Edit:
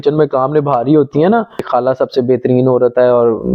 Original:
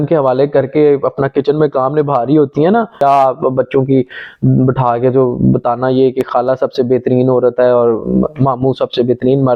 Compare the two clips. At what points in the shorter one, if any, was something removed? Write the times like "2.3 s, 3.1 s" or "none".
1.5 s

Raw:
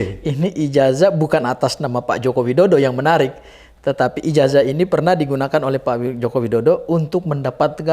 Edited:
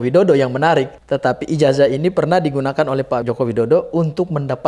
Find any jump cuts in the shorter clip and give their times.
1.0 s, 3.2 s

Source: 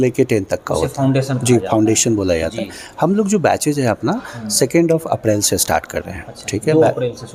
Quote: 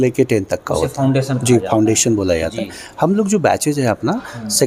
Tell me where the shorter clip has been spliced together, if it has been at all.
none

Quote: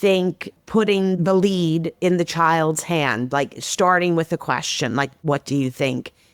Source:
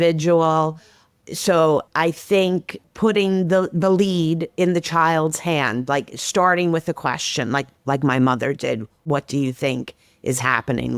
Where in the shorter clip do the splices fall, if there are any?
1.2 s, 5.1 s

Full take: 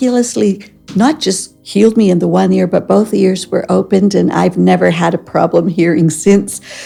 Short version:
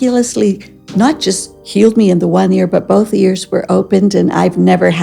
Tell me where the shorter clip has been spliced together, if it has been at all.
none

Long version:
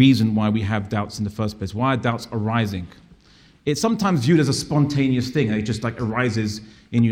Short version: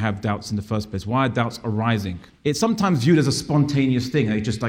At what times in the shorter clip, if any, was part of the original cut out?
2.2 s

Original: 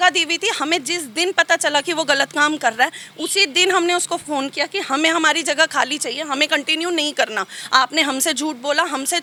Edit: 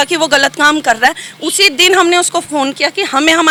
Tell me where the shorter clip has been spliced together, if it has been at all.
none

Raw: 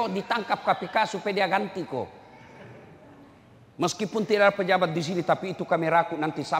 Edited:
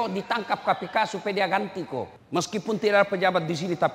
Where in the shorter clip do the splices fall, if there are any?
2.2 s

